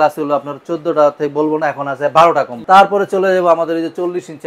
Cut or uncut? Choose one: cut